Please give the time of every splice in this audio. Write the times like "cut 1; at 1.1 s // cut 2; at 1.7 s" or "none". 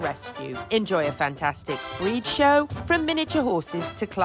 none